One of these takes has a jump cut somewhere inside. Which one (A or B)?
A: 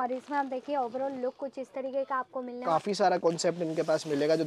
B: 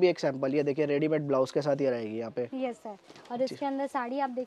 A